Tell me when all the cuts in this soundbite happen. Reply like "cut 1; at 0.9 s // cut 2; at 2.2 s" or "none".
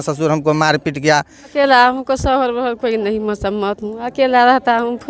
cut 1; at 1.5 s